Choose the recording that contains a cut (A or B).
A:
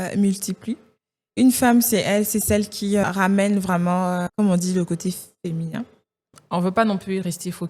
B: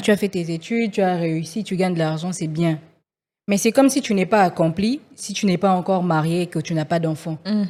A